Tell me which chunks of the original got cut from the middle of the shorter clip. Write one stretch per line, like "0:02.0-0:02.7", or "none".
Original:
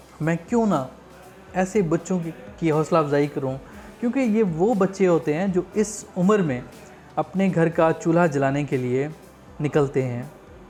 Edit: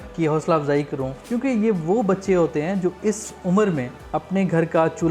0:03.6-0:03.9
0:06.7-0:07.0

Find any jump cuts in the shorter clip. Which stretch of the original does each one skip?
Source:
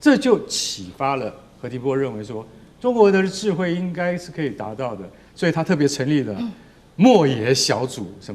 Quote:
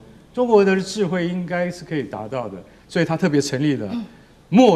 none

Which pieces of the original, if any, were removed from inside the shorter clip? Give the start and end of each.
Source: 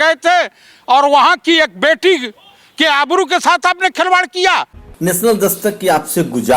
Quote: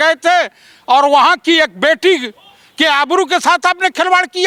none

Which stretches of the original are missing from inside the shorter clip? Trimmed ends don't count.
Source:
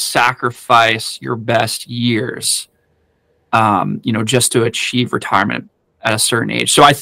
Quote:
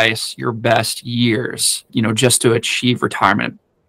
0:02.7-0:04.0

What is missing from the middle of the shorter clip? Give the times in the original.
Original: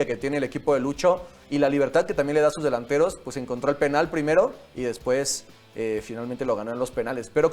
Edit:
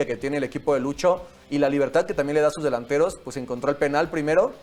none

